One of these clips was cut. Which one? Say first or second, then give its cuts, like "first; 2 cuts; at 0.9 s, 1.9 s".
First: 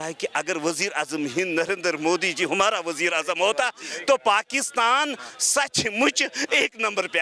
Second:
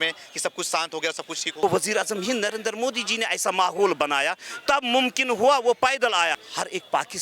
second; 2 cuts; at 1.6 s, 6.4 s